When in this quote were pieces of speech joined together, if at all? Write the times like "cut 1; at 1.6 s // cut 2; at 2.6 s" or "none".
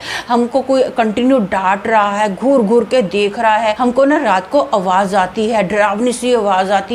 cut 1; at 3.8 s